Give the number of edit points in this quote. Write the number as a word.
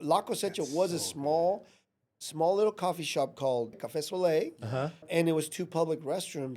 two